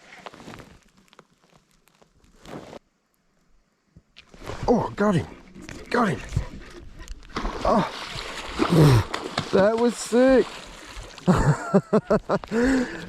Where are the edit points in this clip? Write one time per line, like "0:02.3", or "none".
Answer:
0:02.8